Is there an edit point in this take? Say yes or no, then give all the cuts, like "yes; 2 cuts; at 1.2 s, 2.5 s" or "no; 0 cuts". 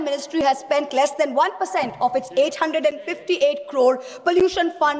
no; 0 cuts